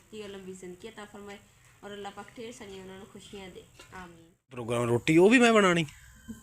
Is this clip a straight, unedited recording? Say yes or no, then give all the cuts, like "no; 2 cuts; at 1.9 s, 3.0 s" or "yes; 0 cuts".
no; 1 cut; at 4.7 s